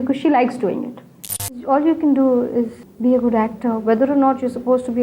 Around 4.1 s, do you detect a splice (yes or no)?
no